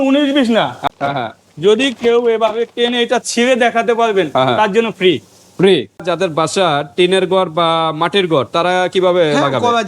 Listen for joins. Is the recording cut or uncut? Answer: cut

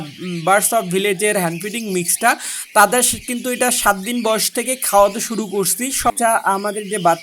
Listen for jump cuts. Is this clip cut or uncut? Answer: cut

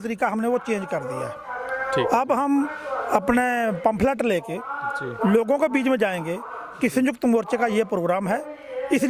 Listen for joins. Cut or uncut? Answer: uncut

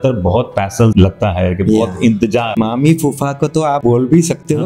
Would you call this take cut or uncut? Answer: cut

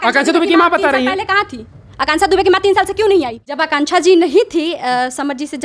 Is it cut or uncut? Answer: cut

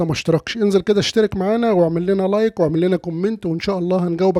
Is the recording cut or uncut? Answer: uncut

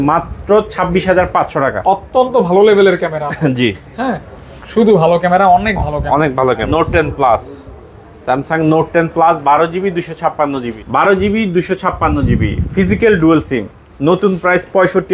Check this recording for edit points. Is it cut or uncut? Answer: cut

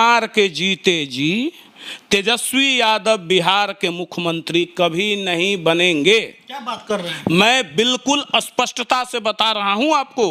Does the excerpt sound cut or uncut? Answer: uncut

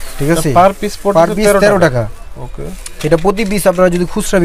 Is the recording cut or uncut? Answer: uncut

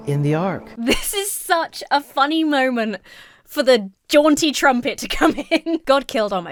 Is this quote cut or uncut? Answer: uncut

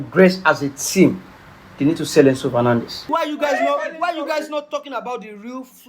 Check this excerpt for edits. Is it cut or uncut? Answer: cut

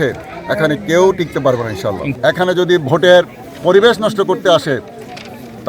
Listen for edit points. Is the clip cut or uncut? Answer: cut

